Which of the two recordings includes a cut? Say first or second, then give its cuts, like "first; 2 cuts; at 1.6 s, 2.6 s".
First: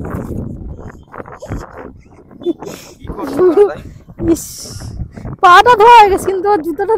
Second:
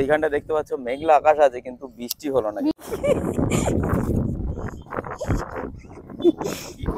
second; 1 cut; at 2.8 s